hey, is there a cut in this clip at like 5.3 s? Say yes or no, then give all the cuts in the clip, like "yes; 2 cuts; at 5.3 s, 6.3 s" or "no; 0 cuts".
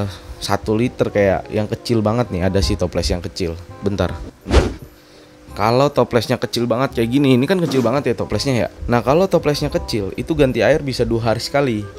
no; 1 cut; at 8.8 s